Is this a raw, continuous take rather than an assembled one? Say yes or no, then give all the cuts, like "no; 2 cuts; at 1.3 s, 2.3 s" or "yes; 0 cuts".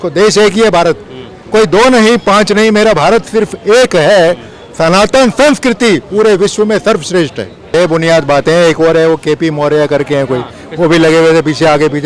no; 1 cut; at 7.6 s